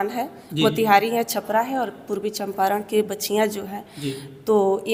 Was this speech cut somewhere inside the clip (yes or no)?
no